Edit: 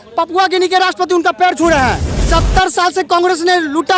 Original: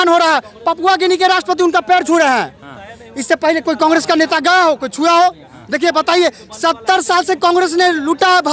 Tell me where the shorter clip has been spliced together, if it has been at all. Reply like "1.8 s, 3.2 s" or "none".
2.1 s